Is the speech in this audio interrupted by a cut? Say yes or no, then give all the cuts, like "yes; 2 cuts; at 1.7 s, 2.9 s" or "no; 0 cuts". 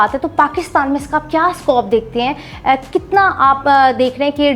no; 0 cuts